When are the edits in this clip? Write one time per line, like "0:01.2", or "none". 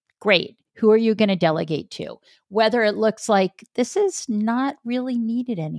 none

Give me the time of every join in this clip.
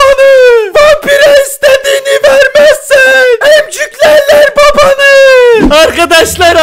0:05.7

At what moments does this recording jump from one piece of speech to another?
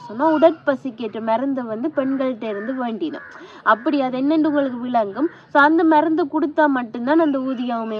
none

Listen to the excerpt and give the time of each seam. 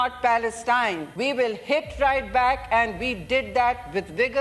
0:01.1

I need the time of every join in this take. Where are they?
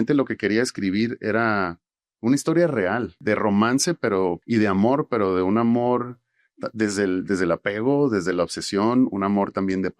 0:03.1
0:04.4

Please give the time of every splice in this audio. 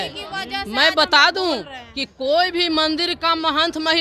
none

